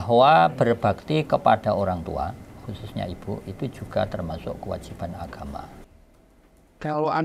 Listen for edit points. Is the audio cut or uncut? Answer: cut